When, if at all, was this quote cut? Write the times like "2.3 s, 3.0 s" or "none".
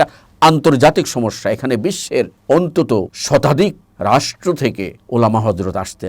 2.4 s, 3.2 s, 3.9 s, 5.0 s